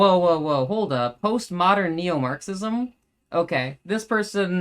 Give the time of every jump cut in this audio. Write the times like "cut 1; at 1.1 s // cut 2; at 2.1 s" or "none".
cut 1; at 1.2 s

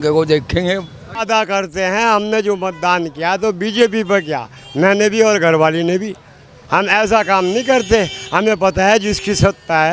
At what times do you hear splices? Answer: cut 1; at 1.2 s

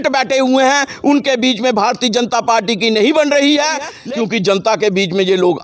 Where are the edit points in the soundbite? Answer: cut 1; at 4.0 s

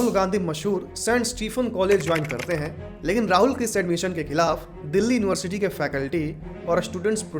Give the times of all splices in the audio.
none

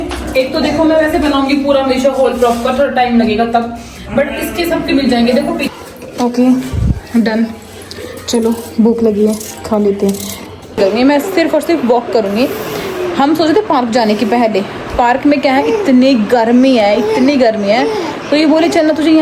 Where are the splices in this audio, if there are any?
cut 1; at 5.7 s // cut 2; at 10.8 s

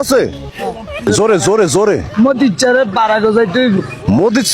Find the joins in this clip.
cut 1; at 1.1 s

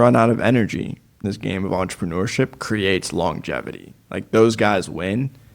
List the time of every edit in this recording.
cut 1; at 1.2 s

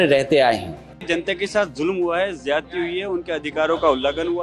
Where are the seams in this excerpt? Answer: cut 1; at 1.0 s

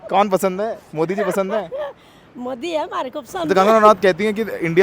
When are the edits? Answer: cut 1; at 3.5 s

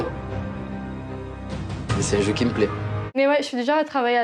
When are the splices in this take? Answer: none

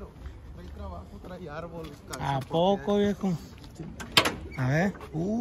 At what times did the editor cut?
none

